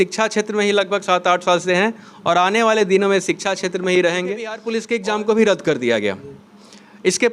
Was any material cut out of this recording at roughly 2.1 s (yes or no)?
no